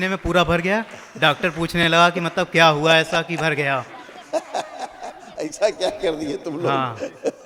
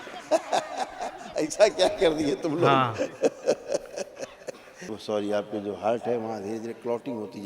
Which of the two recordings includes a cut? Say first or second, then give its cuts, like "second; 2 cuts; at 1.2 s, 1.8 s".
second; 1 cut; at 4.9 s